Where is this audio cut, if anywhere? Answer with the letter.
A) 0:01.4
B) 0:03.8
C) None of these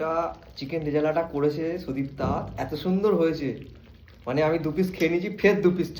C